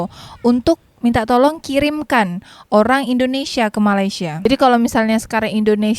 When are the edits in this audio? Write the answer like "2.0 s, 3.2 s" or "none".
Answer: 4.4 s